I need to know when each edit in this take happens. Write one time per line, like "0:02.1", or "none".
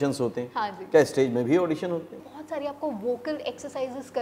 0:02.2